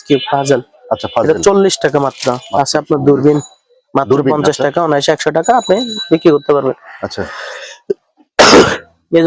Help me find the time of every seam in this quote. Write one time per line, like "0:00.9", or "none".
none